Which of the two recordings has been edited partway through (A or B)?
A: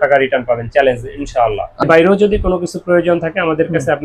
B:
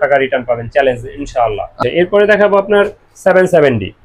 A